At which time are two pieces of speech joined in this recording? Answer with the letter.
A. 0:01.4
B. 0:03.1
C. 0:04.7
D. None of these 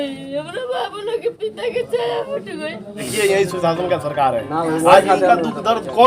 B